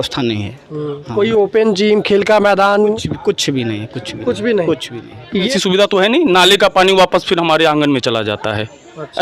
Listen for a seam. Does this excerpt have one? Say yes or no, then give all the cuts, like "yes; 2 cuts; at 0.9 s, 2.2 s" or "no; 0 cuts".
yes; 1 cut; at 5.4 s